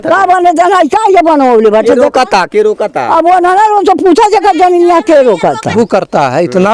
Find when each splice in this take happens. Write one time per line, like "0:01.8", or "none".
0:05.7